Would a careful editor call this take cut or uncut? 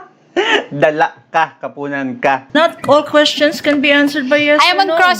cut